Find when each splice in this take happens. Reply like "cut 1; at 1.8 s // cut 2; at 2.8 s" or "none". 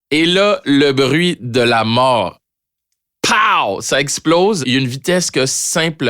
cut 1; at 4.6 s